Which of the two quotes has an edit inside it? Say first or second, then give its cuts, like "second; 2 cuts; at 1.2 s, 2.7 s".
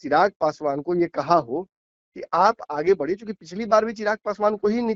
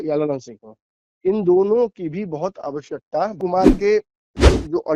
second; 1 cut; at 3.3 s